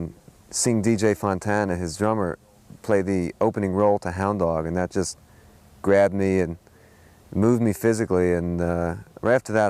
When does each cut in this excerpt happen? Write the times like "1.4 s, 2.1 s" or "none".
none

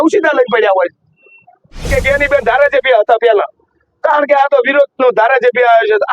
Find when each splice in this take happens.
1.9 s

